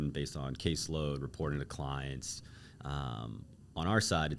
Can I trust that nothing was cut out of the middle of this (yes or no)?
yes